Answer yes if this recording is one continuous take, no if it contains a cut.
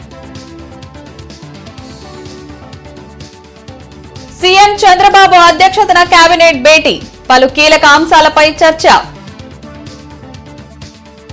yes